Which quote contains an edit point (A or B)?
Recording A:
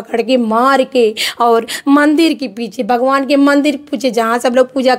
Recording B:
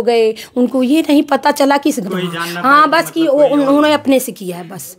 B